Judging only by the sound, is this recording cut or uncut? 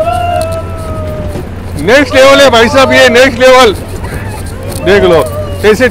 uncut